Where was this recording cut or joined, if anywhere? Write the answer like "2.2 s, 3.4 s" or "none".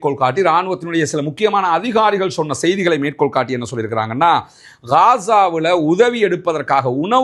1.7 s